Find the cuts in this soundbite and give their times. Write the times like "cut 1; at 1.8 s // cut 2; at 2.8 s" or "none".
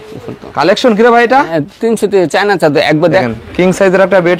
cut 1; at 3.2 s